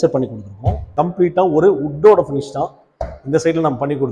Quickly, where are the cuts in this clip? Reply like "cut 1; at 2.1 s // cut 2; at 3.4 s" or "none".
cut 1; at 0.9 s